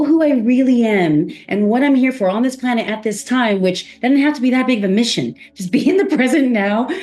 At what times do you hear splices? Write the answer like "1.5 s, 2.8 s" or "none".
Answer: none